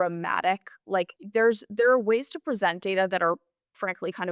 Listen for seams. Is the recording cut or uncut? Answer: cut